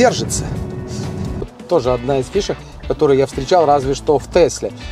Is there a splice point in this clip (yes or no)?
yes